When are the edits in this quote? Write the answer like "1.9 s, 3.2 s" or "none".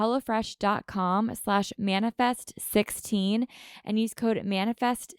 none